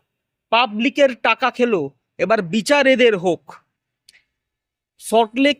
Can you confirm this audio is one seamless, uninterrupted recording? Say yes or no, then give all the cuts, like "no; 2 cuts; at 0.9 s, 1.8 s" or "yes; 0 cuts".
yes; 0 cuts